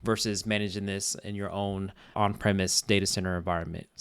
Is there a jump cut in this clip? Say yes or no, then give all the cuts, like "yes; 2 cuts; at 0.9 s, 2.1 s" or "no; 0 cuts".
yes; 1 cut; at 2.1 s